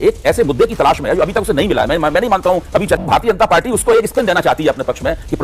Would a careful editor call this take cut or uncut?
cut